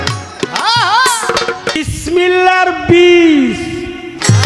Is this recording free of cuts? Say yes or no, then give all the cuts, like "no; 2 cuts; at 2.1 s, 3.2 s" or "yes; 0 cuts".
no; 1 cut; at 1.8 s